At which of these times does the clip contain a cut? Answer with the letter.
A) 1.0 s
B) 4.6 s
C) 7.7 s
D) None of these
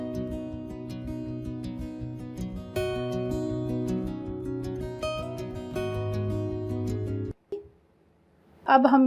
C